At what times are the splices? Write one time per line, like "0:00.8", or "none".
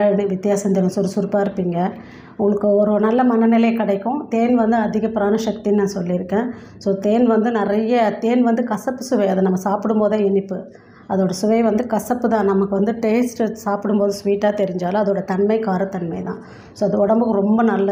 none